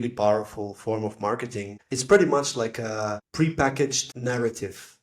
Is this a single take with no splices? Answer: no; 3 cuts; at 1.8 s, 3.2 s, 4.1 s

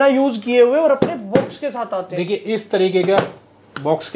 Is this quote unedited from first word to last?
yes; 0 cuts

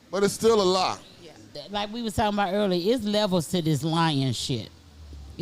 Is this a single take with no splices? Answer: no; 1 cut; at 1.6 s

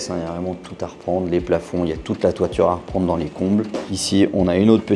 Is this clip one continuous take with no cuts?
yes; 0 cuts

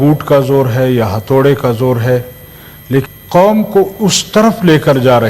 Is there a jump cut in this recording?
yes; 1 cut; at 3.1 s

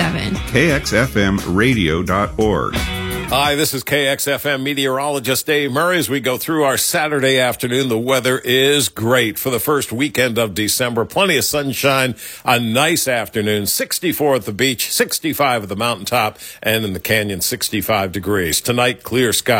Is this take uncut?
no; 1 cut; at 2.8 s

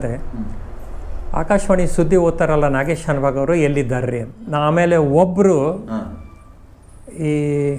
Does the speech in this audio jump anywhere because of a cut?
yes; 1 cut; at 4.4 s

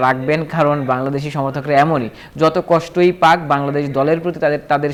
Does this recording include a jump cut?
no; 0 cuts

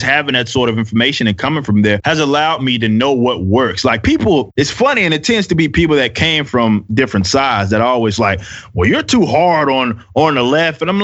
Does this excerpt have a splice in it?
yes; 2 cuts; at 2.0 s, 4.5 s

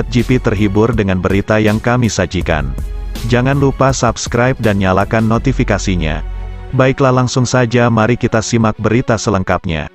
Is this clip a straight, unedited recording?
yes; 0 cuts

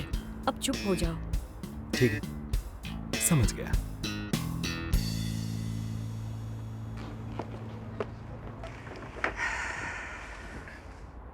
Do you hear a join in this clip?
no; 0 cuts

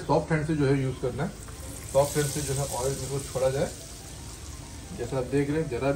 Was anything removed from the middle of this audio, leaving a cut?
no; 0 cuts

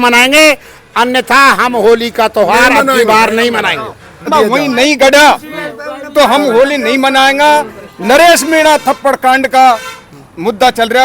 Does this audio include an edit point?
yes; 1 cut; at 4.3 s

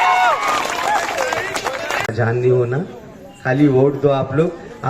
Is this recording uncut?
no; 1 cut; at 2.1 s

